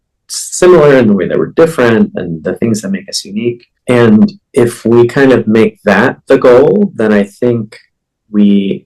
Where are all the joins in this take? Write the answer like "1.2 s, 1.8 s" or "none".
3.7 s

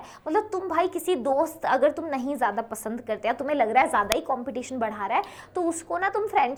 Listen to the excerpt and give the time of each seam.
none

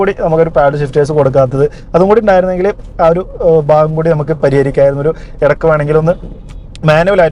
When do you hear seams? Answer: none

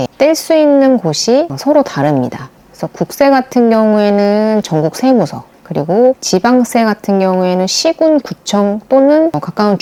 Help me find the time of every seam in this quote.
none

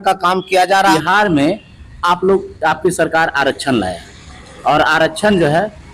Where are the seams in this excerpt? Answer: 0.9 s

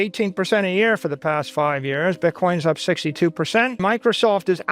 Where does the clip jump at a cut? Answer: 3.8 s

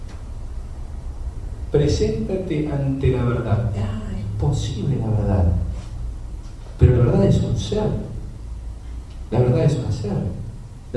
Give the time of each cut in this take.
5.6 s

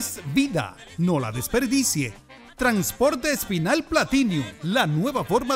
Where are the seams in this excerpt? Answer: none

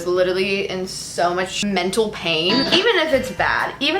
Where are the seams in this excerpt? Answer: 1.5 s, 2.7 s

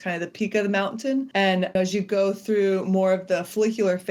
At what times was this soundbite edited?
1.7 s

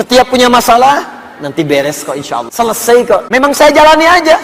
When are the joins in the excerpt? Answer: 2.5 s, 3.3 s

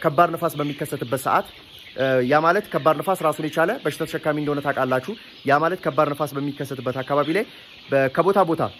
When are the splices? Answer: none

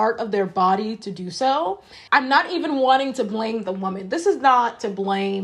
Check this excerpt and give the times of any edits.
none

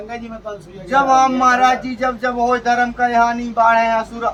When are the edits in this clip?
none

